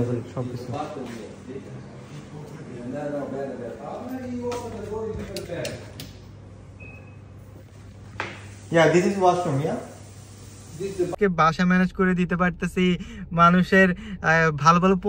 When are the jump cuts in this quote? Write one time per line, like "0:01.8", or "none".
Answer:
0:11.1